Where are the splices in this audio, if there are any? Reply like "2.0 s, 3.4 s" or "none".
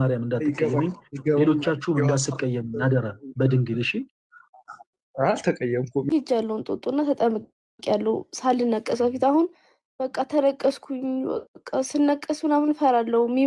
6.1 s